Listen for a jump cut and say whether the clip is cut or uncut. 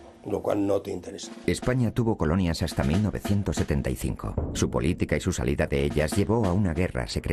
uncut